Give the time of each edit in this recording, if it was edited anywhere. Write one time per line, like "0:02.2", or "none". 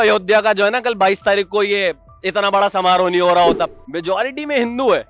0:03.7